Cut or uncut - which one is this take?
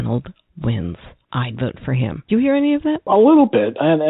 cut